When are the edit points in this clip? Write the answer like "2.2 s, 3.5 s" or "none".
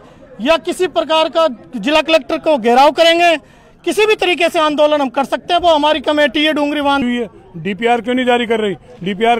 7.0 s